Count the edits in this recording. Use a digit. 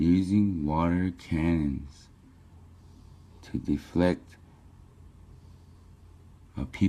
0